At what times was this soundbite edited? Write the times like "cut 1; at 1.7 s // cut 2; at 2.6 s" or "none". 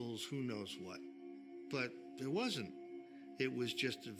none